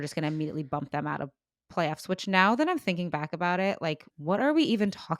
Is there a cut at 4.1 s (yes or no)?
yes